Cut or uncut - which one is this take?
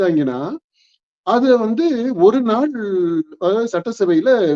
uncut